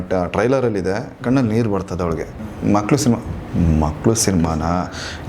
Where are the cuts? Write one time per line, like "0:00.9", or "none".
0:02.3

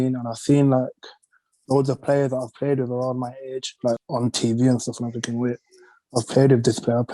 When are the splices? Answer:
0:04.0

